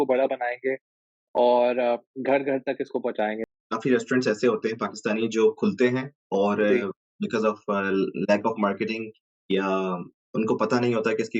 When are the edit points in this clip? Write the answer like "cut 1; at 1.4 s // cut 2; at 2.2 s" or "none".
cut 1; at 3.4 s